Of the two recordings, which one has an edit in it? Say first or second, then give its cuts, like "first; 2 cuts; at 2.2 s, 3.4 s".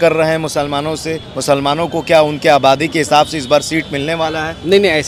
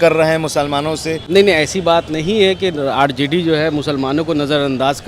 second; 1 cut; at 1.2 s